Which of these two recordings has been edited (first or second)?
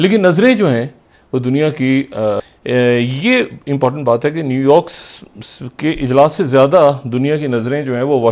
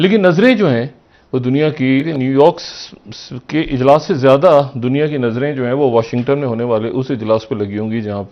second